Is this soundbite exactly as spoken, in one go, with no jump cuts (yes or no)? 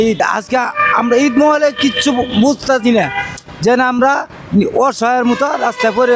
yes